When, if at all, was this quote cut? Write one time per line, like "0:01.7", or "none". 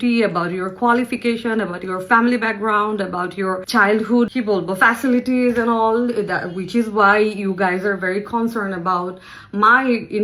0:03.6
0:04.3